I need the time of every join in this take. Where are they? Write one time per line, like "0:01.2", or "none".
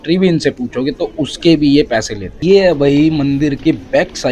0:02.4